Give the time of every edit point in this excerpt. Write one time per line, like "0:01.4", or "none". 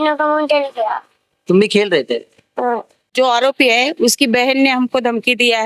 0:03.1